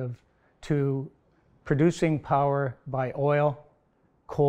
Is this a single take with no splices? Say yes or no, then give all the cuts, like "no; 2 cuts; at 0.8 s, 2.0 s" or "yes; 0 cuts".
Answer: yes; 0 cuts